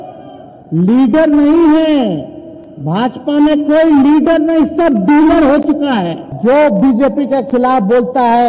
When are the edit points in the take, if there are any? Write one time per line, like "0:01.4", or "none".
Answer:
0:06.2